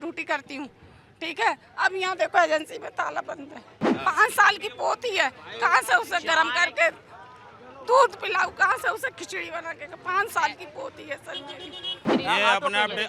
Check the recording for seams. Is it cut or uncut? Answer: cut